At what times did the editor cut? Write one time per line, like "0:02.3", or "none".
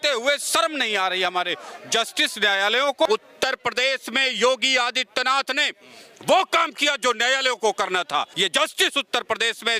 0:03.1
0:08.3